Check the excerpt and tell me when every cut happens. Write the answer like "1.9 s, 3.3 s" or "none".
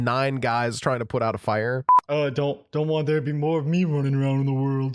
1.8 s

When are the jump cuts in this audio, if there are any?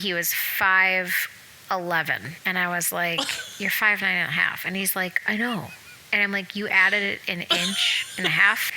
2.3 s

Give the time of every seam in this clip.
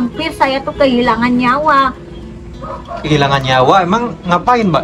none

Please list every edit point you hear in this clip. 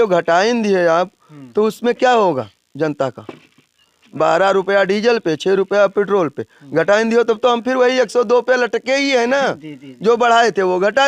none

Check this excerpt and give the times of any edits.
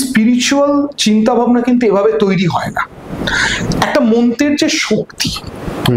none

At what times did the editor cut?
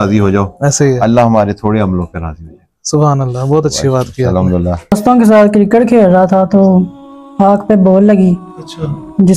4.9 s

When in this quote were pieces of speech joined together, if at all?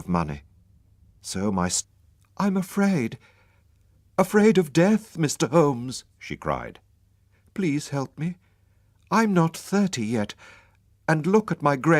none

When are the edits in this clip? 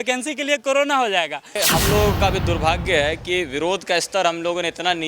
1.6 s

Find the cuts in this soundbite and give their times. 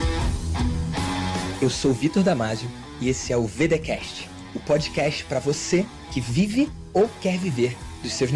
none

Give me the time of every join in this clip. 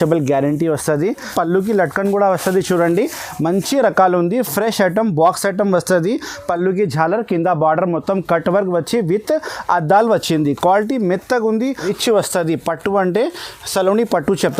1.3 s, 11.9 s

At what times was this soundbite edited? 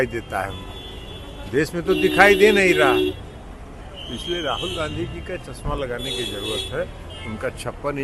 none

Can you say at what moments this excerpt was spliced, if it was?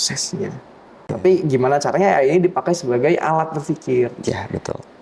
1.0 s

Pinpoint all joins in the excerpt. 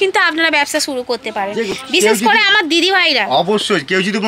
none

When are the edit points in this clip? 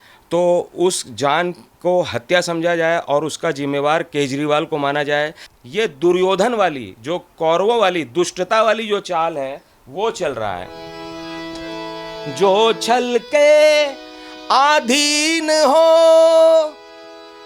5.5 s

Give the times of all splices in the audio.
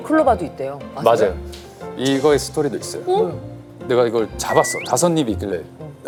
none

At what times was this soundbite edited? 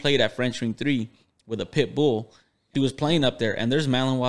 2.6 s

